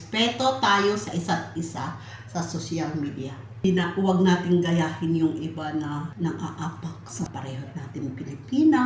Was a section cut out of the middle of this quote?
yes; 3 cuts; at 3.6 s, 6.1 s, 7.3 s

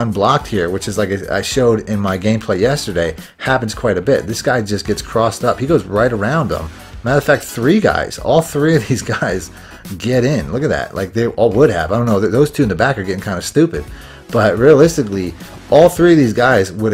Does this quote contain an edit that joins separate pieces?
no; 0 cuts

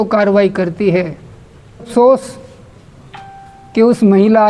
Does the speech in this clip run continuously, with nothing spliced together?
no; 1 cut; at 1.9 s

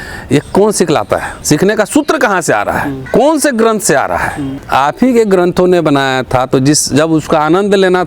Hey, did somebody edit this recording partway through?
yes; 3 cuts; at 1.3 s, 3.0 s, 4.5 s

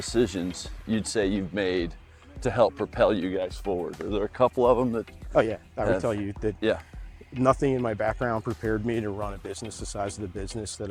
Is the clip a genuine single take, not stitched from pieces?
yes; 0 cuts

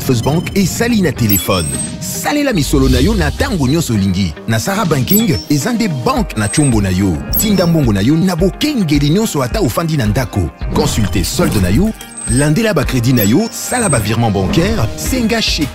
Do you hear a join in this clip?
no; 0 cuts

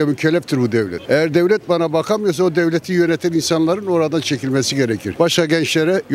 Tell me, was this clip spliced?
no; 0 cuts

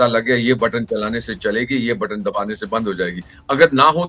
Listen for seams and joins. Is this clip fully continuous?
yes; 0 cuts

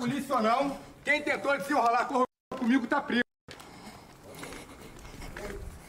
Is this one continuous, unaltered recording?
yes; 0 cuts

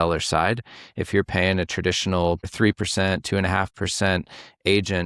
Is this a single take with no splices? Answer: no; 1 cut; at 2.5 s

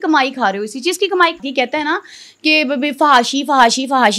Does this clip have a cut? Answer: yes; 1 cut; at 1.4 s

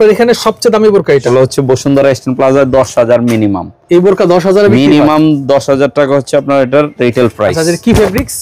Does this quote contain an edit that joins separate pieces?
yes; 1 cut; at 1.3 s

